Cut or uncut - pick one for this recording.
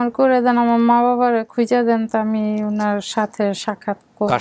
uncut